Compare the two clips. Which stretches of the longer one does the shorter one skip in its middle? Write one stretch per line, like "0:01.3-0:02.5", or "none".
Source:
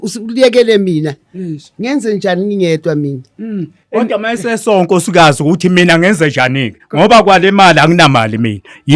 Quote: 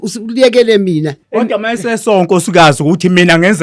0:01.2-0:03.8